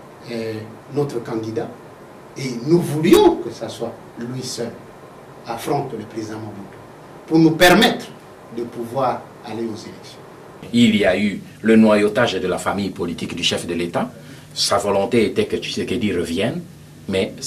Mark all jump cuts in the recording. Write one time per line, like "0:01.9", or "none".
0:10.6